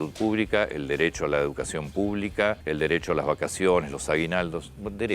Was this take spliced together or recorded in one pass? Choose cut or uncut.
cut